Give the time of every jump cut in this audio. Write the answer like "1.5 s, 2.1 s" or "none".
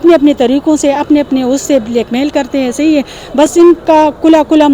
none